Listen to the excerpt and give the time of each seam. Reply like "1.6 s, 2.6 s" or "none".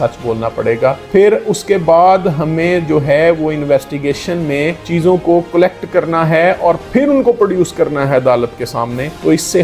none